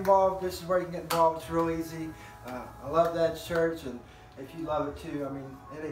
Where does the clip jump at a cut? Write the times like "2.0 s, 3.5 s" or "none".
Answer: 3.8 s